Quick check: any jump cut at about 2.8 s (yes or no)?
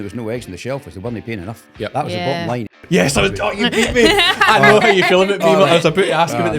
yes